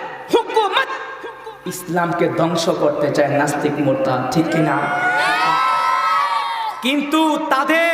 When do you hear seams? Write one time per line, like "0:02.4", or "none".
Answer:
none

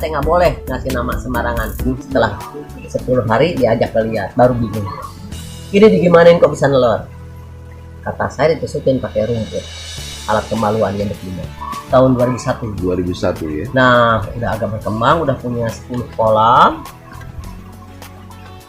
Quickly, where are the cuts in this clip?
0:01.9
0:11.7

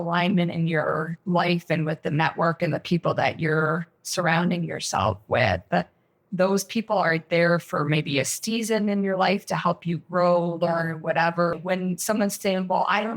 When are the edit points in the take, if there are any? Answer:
0:11.6

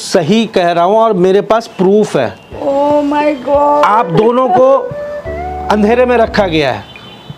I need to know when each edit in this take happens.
0:02.6

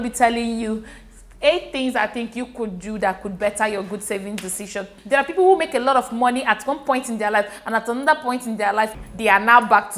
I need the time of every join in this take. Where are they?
0:04.9
0:09.0

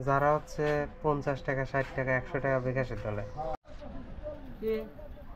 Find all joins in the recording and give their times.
0:03.6

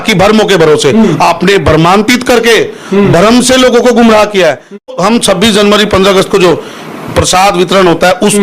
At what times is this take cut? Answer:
0:04.9

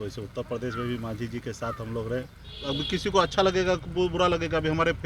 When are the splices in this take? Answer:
0:02.5

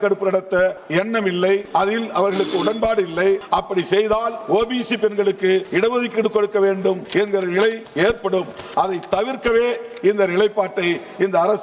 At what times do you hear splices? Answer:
0:00.8
0:01.7
0:03.4
0:04.4
0:05.7
0:07.0
0:07.8

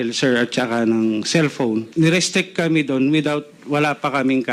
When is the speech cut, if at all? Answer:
0:01.9

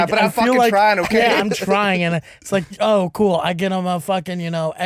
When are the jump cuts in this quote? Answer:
0:02.7

